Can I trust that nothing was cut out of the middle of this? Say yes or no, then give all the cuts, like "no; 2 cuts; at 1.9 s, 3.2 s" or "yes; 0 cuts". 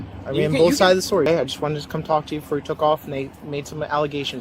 no; 1 cut; at 1.3 s